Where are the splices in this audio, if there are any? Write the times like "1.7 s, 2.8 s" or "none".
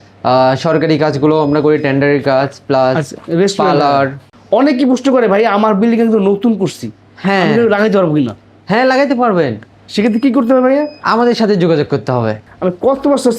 3.1 s, 4.3 s, 12.4 s